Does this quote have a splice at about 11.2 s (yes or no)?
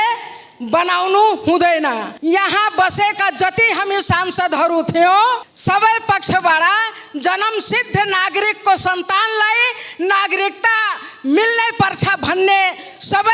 no